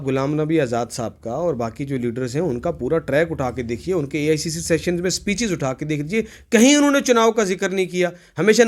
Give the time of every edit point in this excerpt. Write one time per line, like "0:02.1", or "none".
none